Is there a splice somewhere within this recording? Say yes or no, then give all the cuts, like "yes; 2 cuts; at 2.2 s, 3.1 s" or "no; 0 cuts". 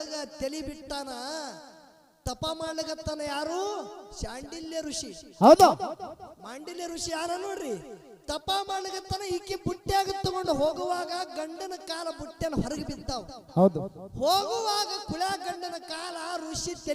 no; 0 cuts